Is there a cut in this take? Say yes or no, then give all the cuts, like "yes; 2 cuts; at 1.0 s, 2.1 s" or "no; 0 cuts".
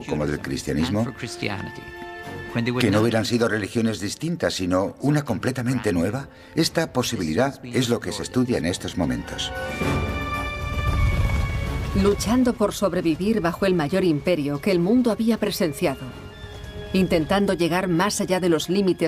no; 0 cuts